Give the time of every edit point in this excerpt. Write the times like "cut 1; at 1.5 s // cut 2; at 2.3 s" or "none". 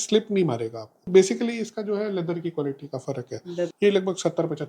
cut 1; at 1.1 s // cut 2; at 3.7 s